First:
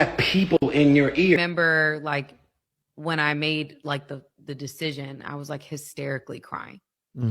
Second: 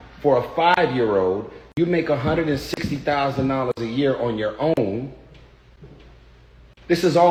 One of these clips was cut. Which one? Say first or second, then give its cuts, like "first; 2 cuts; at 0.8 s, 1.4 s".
first; 1 cut; at 1.4 s